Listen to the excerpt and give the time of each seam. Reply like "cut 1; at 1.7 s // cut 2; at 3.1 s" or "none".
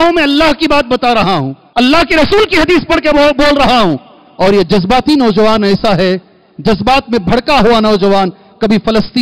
cut 1; at 1.6 s